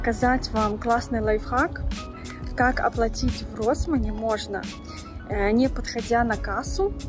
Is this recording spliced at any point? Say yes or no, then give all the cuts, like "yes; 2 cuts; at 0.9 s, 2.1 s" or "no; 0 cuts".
no; 0 cuts